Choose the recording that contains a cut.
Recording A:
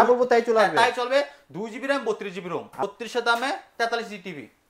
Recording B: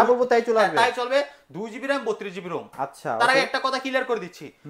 A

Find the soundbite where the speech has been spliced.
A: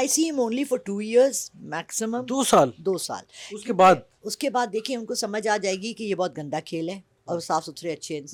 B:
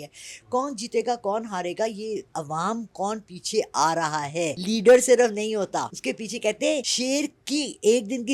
B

